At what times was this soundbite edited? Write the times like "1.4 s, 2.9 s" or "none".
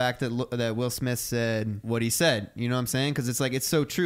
1.8 s